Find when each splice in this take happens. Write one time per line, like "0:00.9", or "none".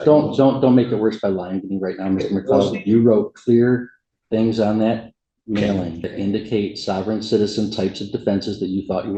0:06.1